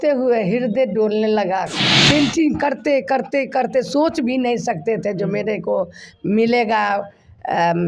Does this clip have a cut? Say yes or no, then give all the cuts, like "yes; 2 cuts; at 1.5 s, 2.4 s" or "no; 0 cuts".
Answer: yes; 1 cut; at 1.8 s